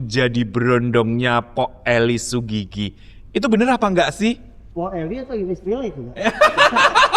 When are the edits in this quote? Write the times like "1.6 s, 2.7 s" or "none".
none

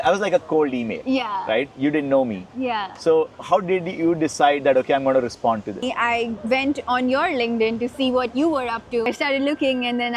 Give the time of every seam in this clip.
5.8 s, 9.0 s

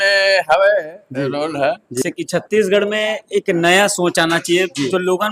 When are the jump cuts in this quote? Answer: 2.0 s

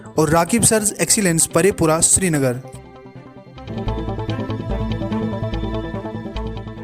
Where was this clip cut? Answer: 3.7 s

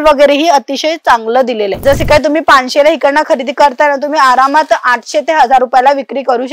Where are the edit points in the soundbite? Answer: 1.8 s

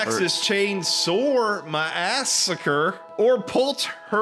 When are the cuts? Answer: 3.0 s

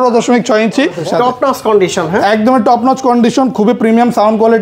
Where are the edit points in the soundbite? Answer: 1.0 s

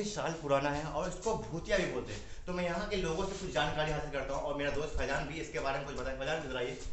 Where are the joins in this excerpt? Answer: none

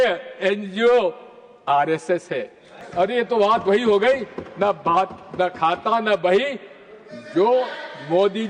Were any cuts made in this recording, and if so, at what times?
2.9 s

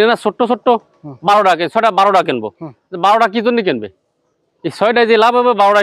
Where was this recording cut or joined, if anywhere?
none

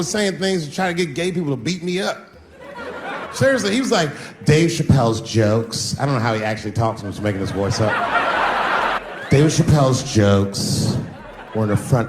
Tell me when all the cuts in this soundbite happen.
3.3 s, 9.0 s

